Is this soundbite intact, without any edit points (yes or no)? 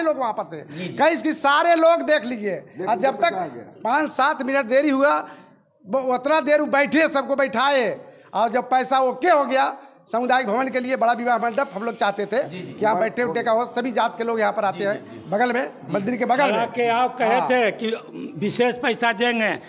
yes